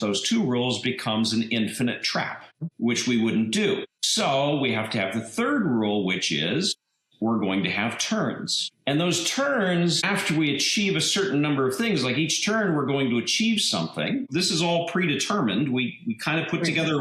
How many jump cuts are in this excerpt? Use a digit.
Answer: 1